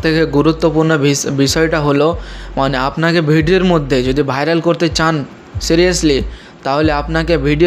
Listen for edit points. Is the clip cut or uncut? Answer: uncut